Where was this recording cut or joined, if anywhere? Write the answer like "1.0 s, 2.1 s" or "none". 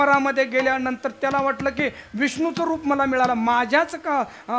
none